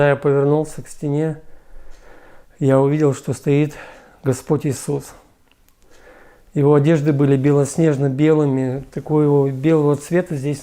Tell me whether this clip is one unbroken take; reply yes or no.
yes